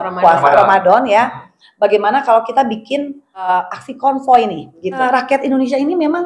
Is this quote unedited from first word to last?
no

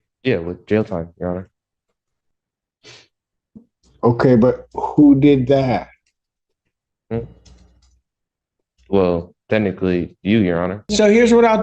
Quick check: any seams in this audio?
yes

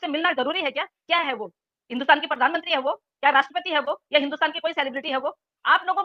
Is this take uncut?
yes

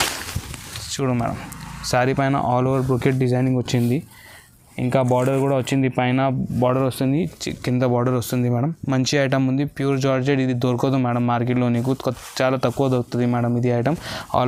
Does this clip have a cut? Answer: no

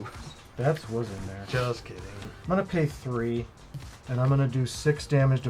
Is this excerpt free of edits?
yes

